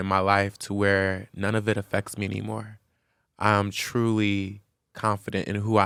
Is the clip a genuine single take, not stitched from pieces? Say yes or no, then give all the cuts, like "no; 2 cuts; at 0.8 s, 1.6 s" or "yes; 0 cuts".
yes; 0 cuts